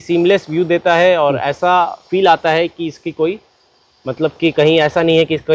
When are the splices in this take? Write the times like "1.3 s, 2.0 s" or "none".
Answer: none